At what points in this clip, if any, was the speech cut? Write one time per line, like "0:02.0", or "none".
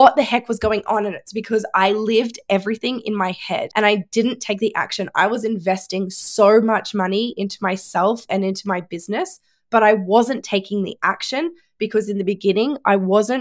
0:03.7

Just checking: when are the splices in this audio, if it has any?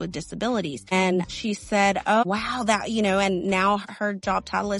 0:01.2
0:02.2
0:03.8

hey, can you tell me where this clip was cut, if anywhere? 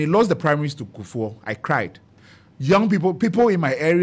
none

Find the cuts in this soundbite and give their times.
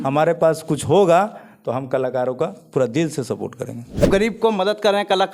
0:04.0

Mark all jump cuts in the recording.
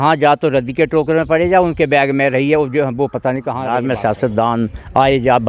0:03.6

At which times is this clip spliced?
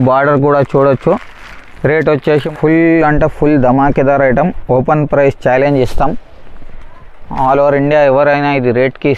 0:02.5

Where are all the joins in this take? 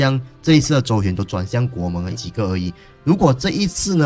0:02.1

